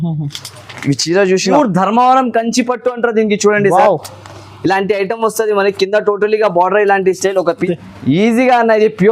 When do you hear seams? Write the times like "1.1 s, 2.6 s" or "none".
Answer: 1.5 s, 7.6 s